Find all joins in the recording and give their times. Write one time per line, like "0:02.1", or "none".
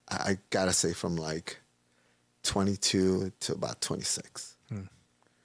none